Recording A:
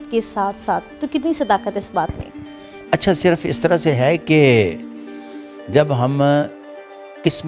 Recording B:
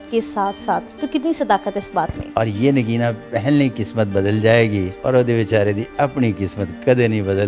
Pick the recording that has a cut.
B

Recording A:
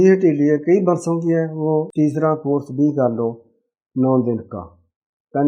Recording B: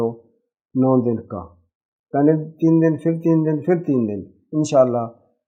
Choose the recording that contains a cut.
A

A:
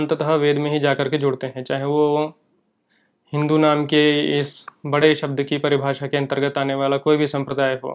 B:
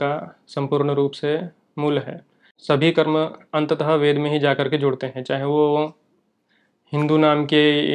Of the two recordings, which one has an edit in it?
B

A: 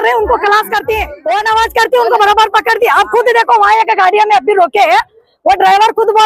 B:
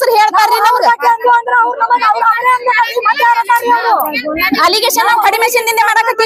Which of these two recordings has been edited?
A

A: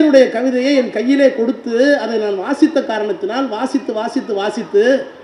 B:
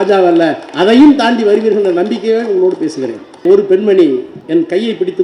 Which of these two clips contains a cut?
B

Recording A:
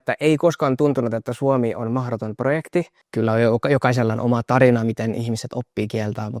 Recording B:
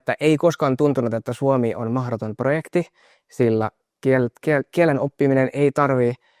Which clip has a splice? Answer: A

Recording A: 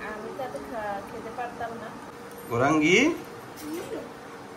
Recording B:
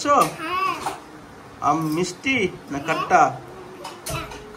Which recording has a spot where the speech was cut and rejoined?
A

